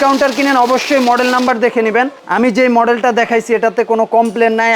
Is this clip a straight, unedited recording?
no; 1 cut; at 2.2 s

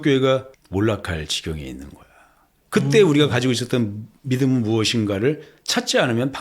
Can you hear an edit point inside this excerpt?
yes; 1 cut; at 2.5 s

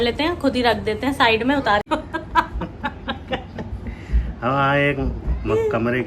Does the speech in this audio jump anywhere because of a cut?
yes; 1 cut; at 1.9 s

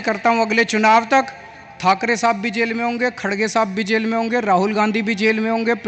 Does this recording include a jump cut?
no; 0 cuts

